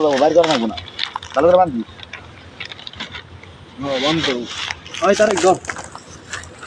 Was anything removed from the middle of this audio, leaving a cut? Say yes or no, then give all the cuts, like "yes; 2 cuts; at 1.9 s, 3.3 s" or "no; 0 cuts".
no; 0 cuts